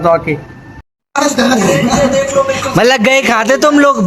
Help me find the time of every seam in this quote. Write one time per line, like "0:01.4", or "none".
0:00.9